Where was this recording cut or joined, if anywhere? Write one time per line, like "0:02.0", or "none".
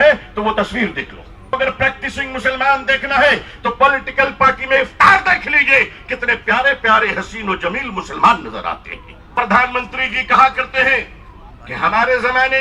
0:01.5
0:09.3